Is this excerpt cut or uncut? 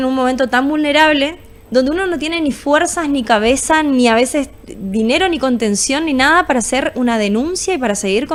uncut